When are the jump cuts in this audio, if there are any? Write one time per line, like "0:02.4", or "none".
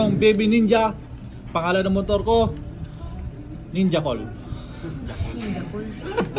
none